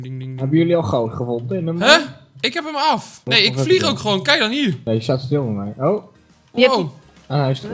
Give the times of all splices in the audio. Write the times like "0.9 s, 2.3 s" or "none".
3.1 s, 4.8 s